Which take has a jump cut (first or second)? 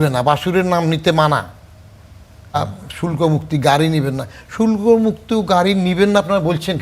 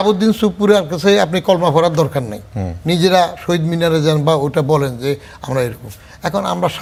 first